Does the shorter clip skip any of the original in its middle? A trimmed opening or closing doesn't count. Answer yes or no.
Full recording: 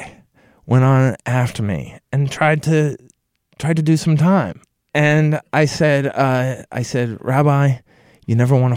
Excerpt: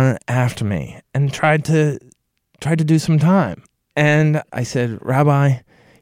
yes